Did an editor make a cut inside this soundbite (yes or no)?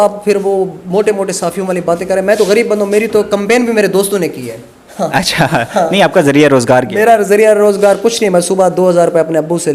no